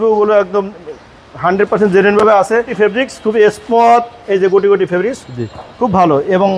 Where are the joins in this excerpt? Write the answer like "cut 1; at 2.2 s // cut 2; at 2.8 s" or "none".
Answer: cut 1; at 2.7 s